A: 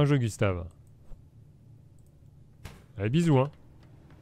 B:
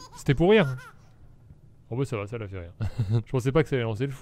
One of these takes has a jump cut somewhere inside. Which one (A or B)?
B